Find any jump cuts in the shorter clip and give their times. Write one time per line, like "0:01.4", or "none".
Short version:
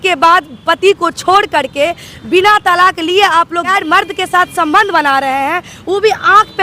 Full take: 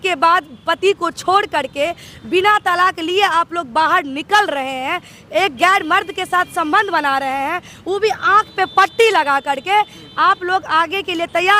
0:03.7